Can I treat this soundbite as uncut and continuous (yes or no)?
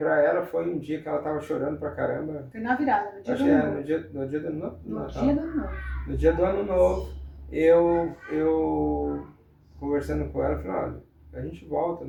yes